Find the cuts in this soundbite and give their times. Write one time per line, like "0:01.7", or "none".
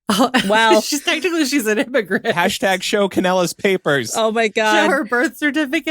0:02.3